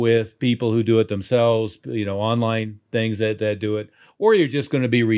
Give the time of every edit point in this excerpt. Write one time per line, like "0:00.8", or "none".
none

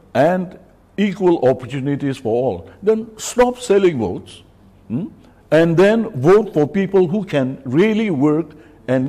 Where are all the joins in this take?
none

